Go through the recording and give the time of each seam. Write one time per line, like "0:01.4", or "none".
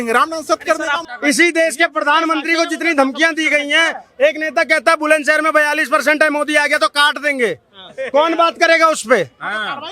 0:01.0